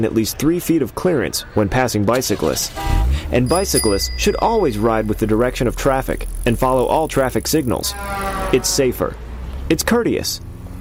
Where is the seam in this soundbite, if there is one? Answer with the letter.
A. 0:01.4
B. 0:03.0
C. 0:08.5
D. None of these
D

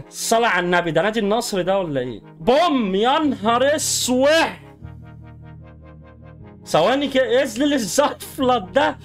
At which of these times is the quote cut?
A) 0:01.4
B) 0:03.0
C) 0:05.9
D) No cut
D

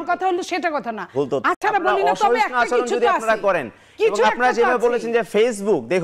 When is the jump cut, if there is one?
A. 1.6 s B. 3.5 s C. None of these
A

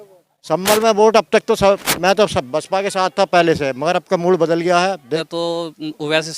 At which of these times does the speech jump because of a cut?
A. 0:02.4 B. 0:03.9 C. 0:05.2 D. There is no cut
C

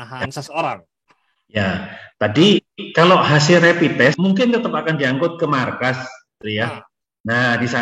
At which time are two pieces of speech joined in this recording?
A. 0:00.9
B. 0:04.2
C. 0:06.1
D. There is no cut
B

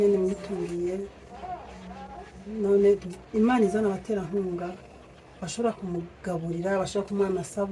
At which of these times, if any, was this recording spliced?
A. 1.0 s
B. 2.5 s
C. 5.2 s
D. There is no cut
D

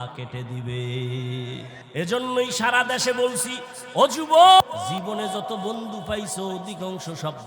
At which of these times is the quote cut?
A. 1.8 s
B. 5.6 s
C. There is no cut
A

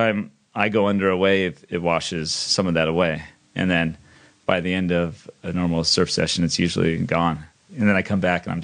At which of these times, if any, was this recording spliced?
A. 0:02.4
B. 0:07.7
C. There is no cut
B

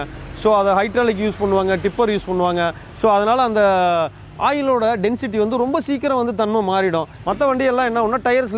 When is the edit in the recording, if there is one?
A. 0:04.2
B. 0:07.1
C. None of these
B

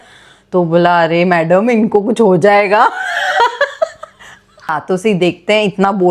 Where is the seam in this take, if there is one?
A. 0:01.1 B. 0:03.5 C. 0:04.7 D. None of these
C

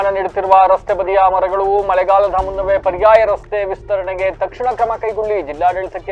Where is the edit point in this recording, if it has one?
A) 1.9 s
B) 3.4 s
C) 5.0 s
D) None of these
D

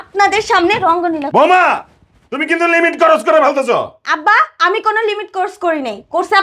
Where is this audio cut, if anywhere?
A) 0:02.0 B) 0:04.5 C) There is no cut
C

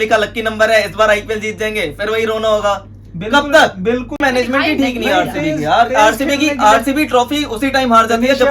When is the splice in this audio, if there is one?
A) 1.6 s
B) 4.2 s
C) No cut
B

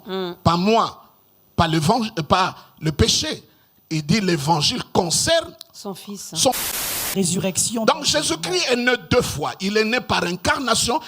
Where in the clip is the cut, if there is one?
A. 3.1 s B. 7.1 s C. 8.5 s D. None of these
B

